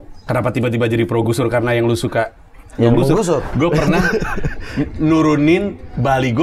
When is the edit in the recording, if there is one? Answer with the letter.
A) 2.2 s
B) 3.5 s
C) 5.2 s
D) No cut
B